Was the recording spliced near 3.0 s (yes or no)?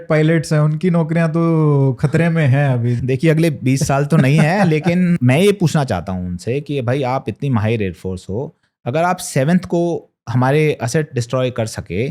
yes